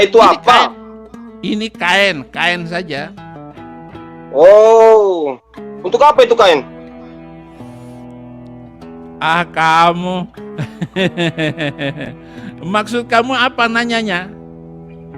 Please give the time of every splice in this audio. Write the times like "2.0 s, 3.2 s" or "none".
none